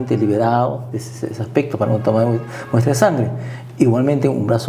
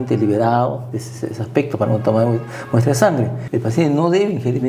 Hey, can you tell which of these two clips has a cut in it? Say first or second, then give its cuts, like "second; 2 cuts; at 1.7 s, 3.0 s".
second; 1 cut; at 3.4 s